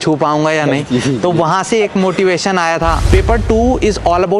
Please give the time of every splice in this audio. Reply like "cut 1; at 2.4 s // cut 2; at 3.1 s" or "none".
cut 1; at 3.0 s